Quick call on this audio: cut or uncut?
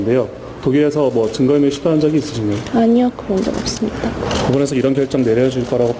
uncut